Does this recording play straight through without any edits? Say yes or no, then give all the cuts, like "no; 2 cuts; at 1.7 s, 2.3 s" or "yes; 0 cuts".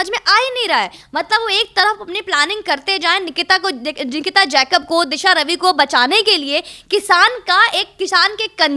yes; 0 cuts